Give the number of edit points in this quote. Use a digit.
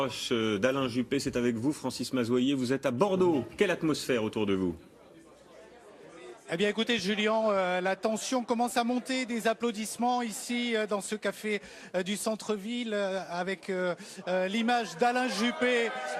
1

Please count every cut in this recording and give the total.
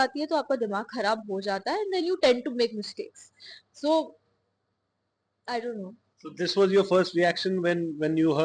0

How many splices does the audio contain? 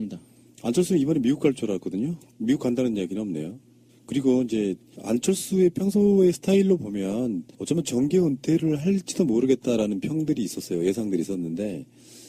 1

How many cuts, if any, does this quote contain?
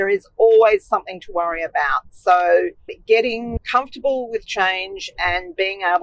0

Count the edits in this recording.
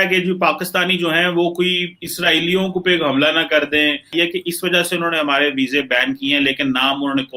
1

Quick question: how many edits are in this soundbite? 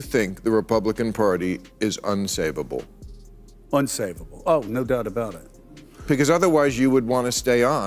1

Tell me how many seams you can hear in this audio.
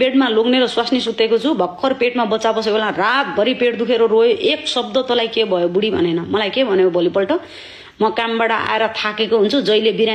0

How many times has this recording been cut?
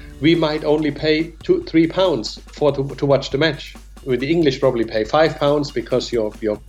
1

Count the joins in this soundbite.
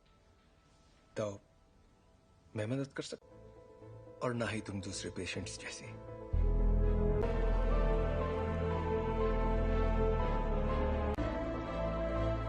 1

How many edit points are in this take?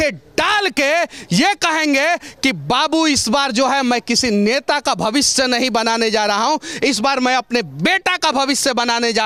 0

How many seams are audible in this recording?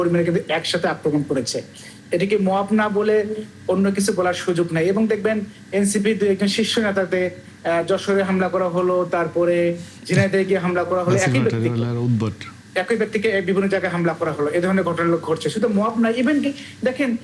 0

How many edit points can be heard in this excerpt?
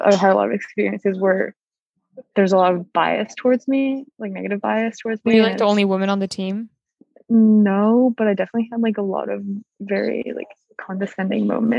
0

